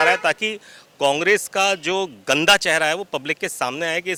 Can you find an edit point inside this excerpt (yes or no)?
no